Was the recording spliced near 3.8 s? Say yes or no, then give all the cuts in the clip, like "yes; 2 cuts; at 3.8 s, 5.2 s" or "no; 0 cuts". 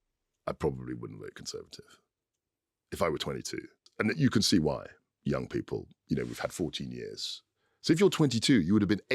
yes; 1 cut; at 3.8 s